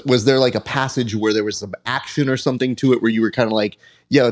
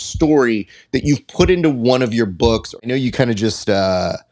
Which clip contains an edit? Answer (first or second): second